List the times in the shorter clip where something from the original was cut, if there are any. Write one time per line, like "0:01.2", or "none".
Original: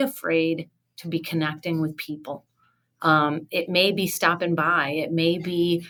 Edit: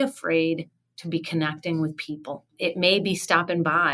0:02.5